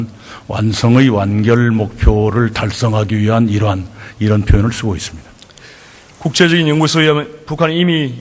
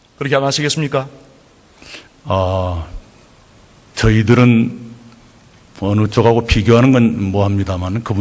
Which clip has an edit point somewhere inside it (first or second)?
first